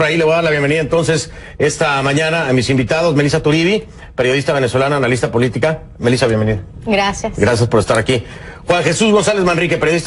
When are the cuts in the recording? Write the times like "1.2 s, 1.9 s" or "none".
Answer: none